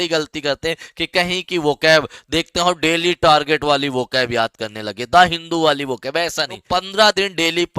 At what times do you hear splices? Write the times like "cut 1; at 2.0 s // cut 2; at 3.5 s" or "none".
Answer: cut 1; at 6.6 s